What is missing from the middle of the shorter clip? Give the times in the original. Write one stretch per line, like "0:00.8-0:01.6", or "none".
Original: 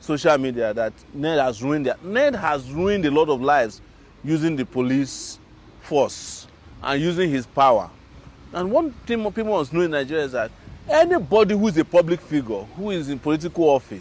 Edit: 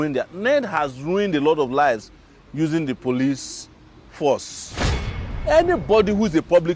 0:06.8-0:10.5